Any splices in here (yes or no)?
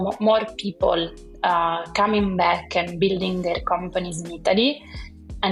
no